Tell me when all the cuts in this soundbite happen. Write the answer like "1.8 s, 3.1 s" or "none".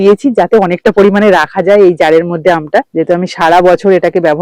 none